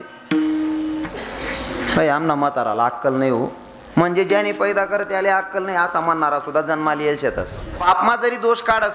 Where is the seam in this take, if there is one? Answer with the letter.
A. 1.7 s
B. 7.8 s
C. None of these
B